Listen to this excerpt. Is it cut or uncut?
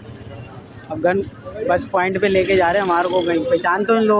uncut